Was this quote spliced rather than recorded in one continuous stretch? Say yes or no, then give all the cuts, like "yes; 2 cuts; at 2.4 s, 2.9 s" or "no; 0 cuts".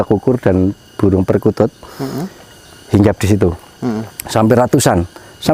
no; 0 cuts